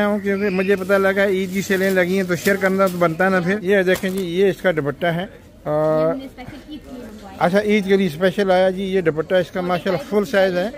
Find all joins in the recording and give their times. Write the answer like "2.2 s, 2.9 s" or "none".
3.6 s